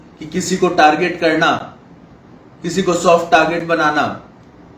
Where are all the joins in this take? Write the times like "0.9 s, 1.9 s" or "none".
none